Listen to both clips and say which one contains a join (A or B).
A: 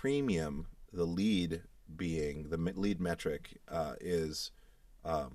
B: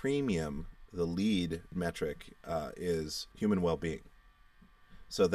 B